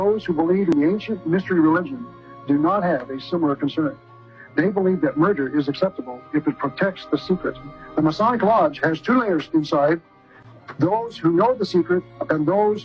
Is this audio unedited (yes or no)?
yes